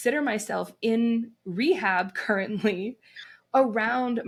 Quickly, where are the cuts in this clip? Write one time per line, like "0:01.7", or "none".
none

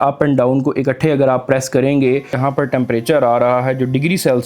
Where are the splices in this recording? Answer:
0:02.4

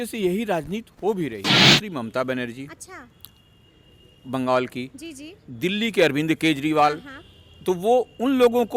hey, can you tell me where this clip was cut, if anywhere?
0:01.5

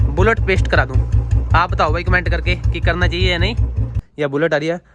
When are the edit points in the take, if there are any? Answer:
0:04.0

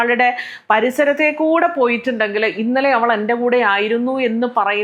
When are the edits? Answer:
none

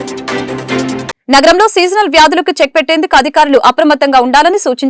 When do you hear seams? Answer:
0:01.1

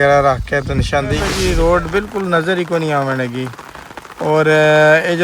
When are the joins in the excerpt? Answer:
0:01.3

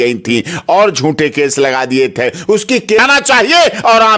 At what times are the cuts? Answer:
0:03.0

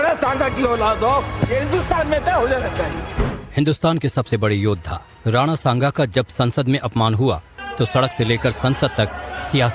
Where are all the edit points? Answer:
0:01.3

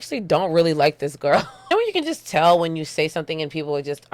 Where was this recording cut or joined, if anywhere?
0:01.6

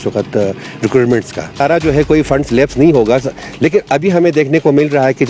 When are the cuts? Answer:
0:01.6

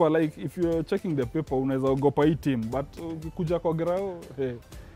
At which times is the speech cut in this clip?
none

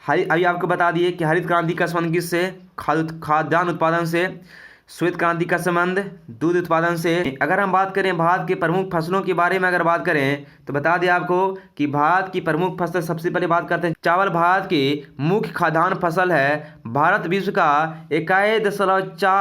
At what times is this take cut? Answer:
0:07.3
0:14.0

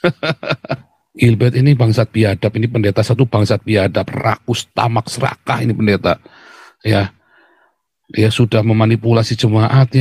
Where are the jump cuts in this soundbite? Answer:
0:01.0

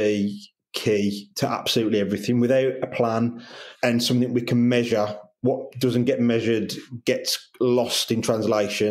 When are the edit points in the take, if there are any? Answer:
none

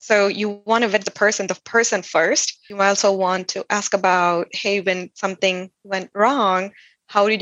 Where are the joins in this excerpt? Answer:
0:02.6

